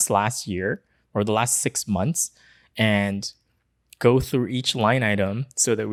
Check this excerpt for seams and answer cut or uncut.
uncut